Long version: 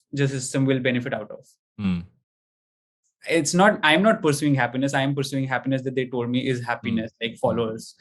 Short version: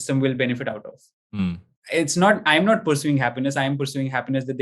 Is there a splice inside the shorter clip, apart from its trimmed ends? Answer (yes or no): yes